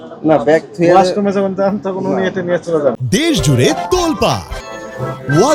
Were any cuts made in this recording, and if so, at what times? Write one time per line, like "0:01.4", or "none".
none